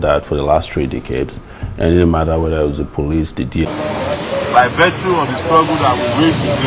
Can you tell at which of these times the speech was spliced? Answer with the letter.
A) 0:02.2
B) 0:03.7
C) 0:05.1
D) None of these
B